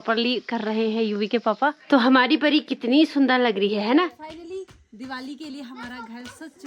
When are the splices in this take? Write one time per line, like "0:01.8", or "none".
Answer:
0:01.8
0:04.2